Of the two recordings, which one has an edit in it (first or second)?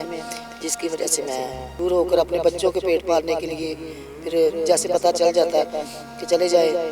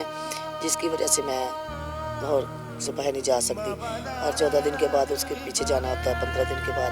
first